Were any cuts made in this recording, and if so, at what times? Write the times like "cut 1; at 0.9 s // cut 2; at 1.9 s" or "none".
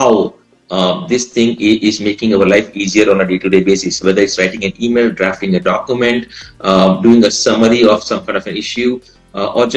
none